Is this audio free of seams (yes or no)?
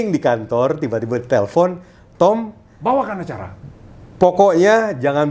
yes